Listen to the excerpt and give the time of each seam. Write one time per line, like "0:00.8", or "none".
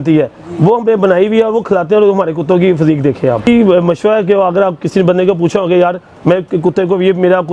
0:03.5